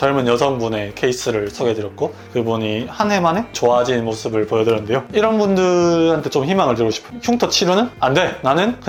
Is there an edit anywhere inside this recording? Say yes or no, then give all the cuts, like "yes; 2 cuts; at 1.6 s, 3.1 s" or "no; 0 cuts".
no; 0 cuts